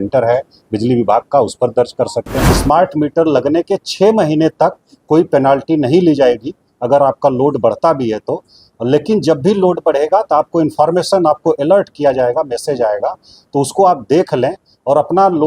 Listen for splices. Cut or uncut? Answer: cut